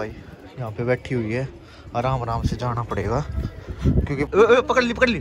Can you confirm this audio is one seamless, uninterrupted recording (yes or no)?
no